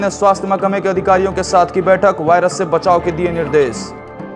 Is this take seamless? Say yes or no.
yes